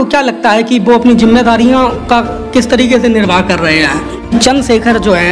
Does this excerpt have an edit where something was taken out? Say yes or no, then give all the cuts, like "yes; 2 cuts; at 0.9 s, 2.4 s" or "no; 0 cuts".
yes; 1 cut; at 4.3 s